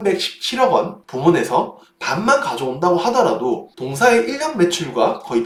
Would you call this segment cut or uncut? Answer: uncut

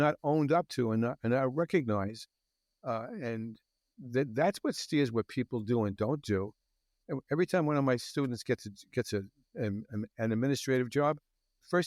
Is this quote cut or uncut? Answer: uncut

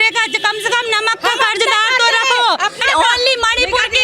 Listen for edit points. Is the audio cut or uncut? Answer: cut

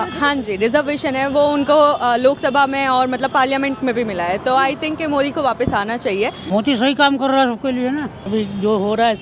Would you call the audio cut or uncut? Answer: cut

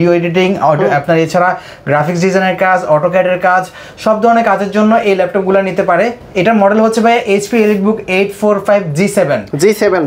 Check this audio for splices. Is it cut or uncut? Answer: uncut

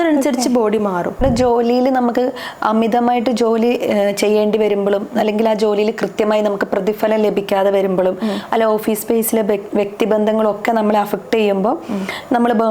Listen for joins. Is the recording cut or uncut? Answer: cut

